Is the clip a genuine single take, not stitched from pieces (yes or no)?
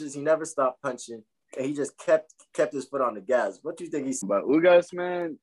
no